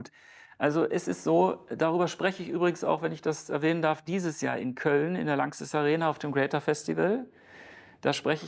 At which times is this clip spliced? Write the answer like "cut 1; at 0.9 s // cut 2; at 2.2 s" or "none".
none